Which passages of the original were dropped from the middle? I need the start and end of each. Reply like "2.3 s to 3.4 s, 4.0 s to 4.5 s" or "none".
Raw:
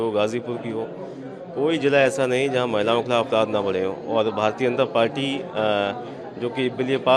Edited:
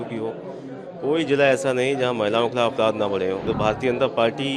4.0 s to 4.3 s